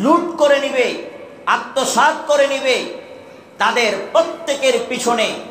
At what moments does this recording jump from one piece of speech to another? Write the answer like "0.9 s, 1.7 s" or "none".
none